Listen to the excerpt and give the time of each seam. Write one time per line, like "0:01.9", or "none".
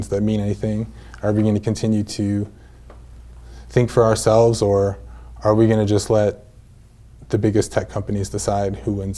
none